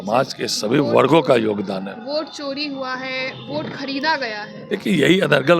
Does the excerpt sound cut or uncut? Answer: uncut